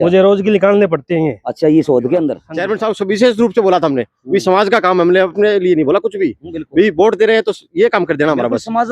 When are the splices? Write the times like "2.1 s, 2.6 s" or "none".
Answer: 2.5 s

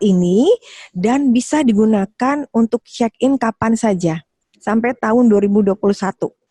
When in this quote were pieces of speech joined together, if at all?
none

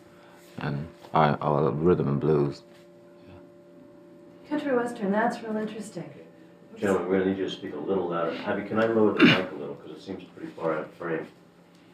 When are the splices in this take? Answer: 0.9 s

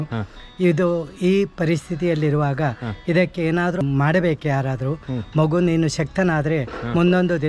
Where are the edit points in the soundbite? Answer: 3.8 s

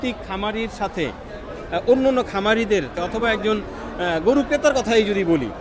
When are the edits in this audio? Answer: 2.9 s

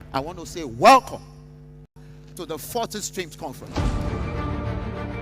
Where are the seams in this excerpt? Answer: 1.9 s

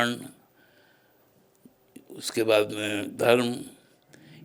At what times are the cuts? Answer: none

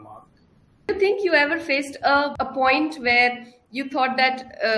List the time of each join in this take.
0.9 s, 2.3 s

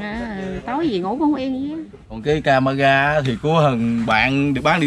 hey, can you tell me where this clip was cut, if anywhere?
2.2 s

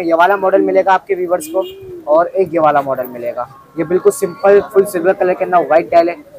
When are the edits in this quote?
none

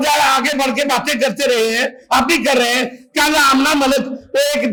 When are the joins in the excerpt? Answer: none

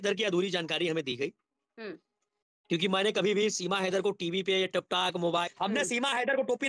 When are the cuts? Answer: 5.4 s

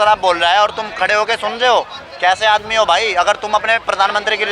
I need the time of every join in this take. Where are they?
none

